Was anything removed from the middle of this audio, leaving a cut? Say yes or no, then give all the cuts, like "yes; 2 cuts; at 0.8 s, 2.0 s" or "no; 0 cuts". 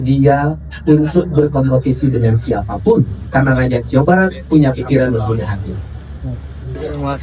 no; 0 cuts